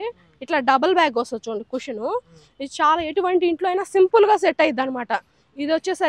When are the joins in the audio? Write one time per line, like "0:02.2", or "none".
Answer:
none